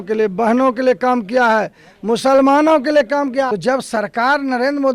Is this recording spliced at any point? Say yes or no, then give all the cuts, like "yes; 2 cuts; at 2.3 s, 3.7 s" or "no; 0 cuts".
yes; 1 cut; at 3.5 s